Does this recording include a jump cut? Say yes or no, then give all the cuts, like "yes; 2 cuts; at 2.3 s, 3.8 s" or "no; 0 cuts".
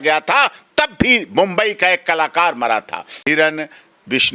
yes; 1 cut; at 3.1 s